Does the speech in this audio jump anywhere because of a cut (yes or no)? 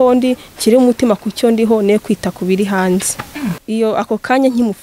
yes